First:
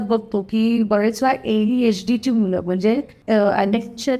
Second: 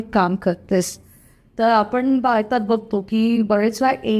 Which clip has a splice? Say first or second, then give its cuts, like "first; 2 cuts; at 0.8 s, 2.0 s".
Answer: first; 1 cut; at 3.1 s